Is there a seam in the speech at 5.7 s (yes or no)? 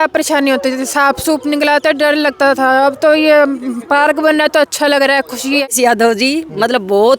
yes